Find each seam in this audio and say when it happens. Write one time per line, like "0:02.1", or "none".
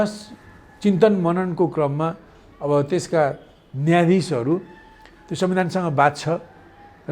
none

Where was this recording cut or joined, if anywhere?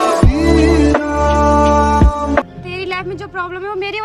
0:02.4

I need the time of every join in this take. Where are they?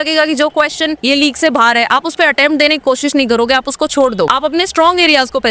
0:01.0
0:04.3

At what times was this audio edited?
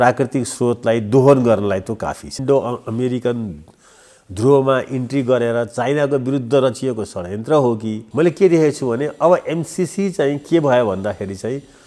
0:02.4
0:08.0

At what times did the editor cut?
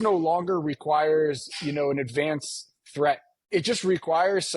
0:03.3

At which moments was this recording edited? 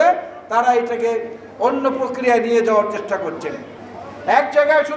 0:03.6

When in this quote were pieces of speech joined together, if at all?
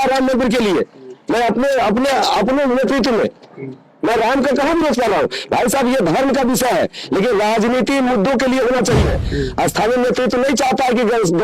0:09.2

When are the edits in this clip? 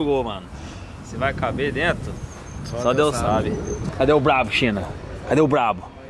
0:03.8

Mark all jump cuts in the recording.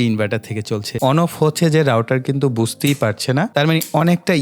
0:00.9
0:03.5

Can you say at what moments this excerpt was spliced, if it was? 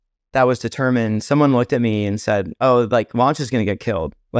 none

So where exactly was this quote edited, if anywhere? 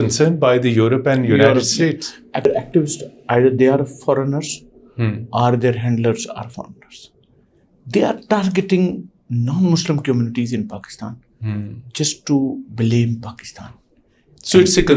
0:02.5

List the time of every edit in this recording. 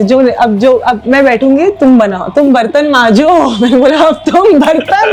none

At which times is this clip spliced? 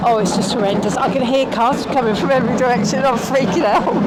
none

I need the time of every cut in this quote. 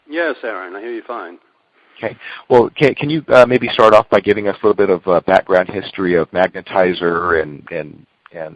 0:07.6

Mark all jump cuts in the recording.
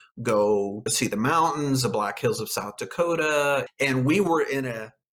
0:03.7

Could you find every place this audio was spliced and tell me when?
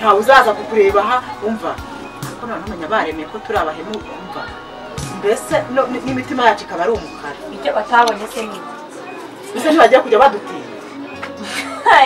none

